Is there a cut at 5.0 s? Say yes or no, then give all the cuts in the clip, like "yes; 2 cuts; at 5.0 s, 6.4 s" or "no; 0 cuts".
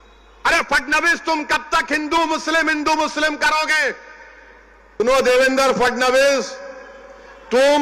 yes; 1 cut; at 5.0 s